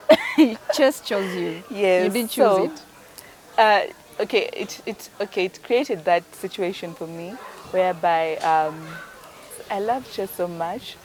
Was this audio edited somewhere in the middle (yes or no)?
no